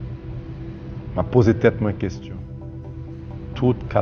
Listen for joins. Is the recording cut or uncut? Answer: uncut